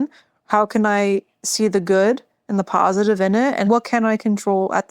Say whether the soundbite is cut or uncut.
cut